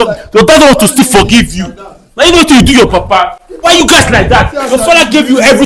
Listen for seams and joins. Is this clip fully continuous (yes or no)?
yes